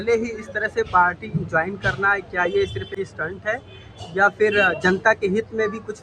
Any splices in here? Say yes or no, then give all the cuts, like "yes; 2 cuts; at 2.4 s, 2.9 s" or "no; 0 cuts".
yes; 1 cut; at 2.9 s